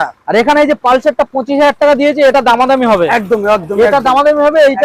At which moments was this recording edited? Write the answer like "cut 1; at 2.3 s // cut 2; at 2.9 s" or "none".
none